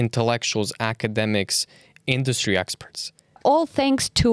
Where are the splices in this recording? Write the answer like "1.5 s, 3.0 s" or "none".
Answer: 3.4 s